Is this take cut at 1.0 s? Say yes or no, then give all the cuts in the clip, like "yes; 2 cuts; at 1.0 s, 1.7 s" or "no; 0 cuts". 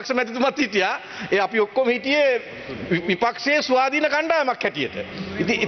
no; 0 cuts